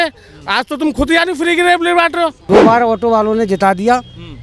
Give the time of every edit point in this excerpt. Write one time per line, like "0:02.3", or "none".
0:02.4